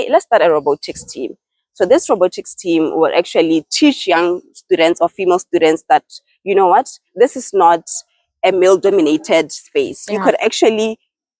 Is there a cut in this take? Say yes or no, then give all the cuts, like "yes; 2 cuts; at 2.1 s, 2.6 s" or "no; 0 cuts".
no; 0 cuts